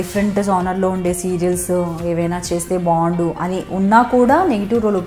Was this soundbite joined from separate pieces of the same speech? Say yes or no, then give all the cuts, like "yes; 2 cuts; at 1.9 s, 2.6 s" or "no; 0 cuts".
no; 0 cuts